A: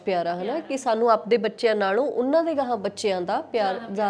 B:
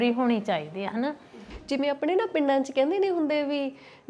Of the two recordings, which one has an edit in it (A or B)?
B